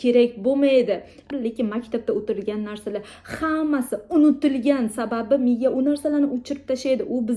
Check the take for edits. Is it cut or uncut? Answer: cut